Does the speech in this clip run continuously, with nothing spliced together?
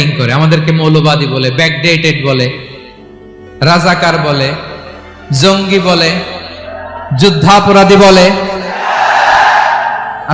yes; 0 cuts

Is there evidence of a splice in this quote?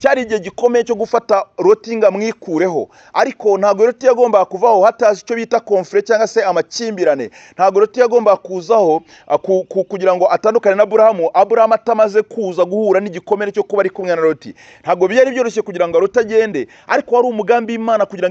no; 0 cuts

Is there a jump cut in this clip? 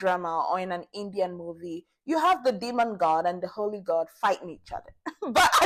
no; 0 cuts

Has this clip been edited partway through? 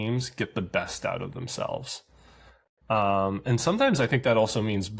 no; 0 cuts

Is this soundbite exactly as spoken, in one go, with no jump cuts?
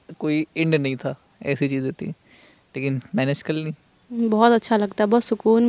no; 1 cut; at 4.2 s

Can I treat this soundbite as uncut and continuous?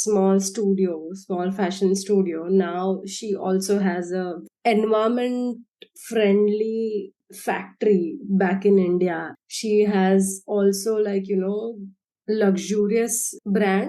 no; 2 cuts; at 4.3 s, 7.2 s

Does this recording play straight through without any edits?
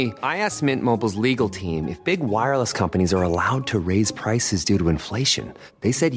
yes; 0 cuts

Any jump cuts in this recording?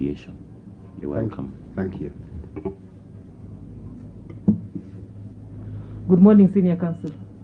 no; 0 cuts

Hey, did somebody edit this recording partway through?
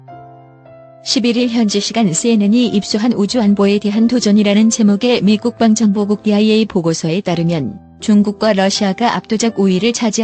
yes; 1 cut; at 1.1 s

